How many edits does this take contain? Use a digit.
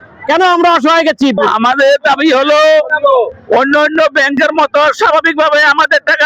1